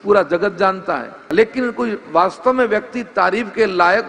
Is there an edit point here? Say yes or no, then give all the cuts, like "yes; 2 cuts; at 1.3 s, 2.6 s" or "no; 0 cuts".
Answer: yes; 1 cut; at 1.2 s